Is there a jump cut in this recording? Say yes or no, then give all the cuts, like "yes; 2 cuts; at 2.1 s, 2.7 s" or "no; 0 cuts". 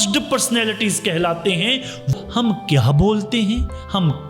yes; 1 cut; at 2.1 s